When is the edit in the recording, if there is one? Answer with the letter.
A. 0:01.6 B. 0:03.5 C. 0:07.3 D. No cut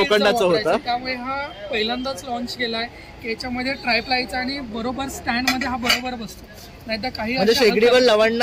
D